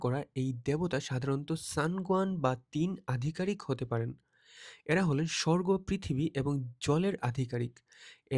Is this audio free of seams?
yes; 0 cuts

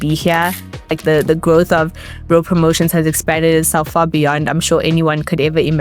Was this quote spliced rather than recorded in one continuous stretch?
yes; 1 cut; at 1.0 s

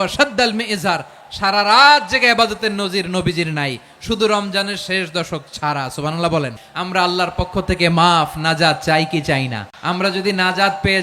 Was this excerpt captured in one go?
no; 1 cut; at 6.7 s

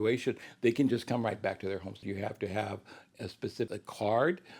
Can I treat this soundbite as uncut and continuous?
no; 2 cuts; at 2.0 s, 3.7 s

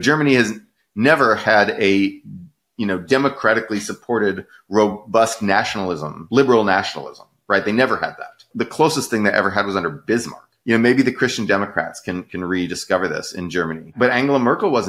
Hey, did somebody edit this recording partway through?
yes; 3 cuts; at 6.1 s, 10.6 s, 13.9 s

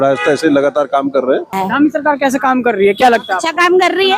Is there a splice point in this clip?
yes; 1 cut; at 1.6 s

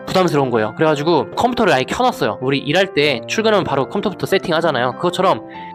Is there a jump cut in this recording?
no; 0 cuts

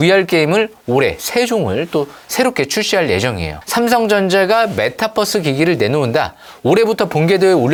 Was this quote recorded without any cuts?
yes; 0 cuts

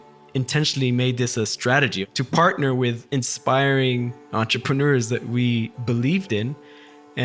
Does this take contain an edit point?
yes; 1 cut; at 2.0 s

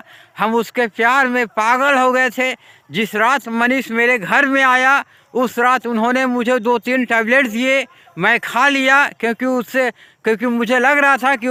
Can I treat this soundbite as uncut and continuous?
yes; 0 cuts

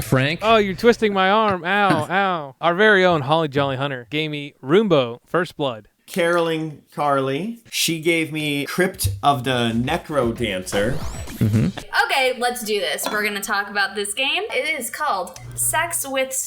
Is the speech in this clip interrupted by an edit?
yes; 6 cuts; at 2.5 s, 4.1 s, 6.0 s, 7.7 s, 11.8 s, 14.5 s

